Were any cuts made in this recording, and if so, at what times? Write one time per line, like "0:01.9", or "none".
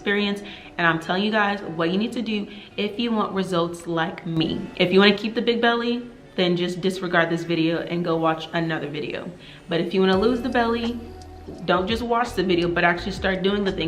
none